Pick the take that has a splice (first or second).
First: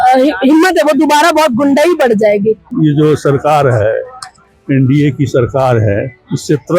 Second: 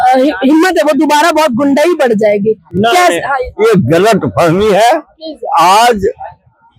first